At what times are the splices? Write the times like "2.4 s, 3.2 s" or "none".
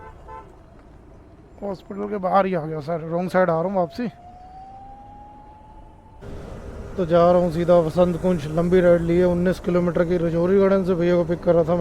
6.2 s